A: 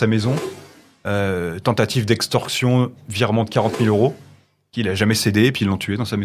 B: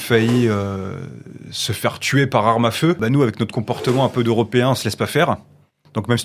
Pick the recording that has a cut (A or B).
B